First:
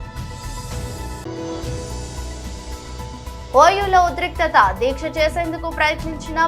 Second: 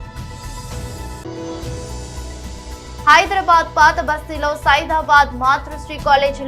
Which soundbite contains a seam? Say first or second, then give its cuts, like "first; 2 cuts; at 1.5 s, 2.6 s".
first; 2 cuts; at 1.2 s, 3.5 s